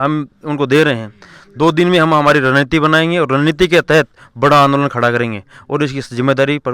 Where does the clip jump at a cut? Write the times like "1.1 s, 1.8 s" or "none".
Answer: none